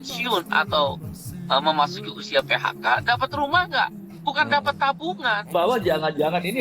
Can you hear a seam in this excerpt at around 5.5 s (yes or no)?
yes